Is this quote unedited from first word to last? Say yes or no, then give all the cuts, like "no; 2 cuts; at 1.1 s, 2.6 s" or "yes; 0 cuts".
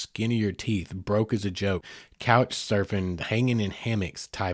no; 1 cut; at 1.9 s